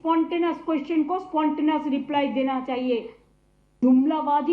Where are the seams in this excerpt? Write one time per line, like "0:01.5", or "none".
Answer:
0:03.2